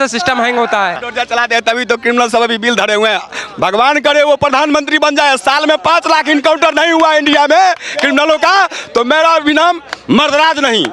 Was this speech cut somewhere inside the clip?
yes; 1 cut; at 1.0 s

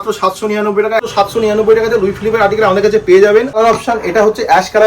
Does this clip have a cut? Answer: yes; 2 cuts; at 1.1 s, 3.6 s

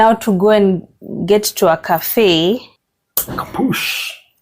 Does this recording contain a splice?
yes; 1 cut; at 3.5 s

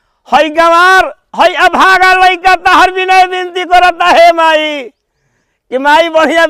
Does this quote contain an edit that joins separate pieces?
no; 0 cuts

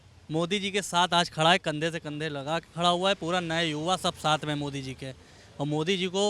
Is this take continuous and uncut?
yes; 0 cuts

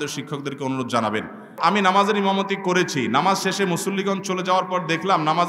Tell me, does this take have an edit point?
yes; 1 cut; at 1.6 s

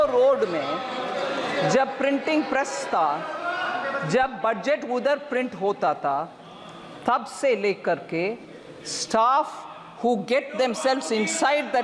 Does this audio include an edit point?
no; 0 cuts

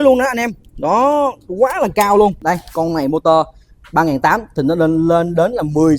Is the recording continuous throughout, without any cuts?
no; 1 cut; at 2.4 s

